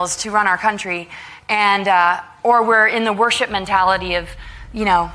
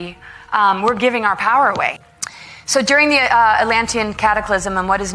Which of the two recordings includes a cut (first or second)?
second